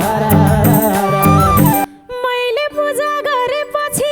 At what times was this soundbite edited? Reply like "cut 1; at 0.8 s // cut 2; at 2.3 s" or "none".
cut 1; at 1.8 s